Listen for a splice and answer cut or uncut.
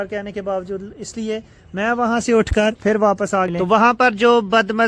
cut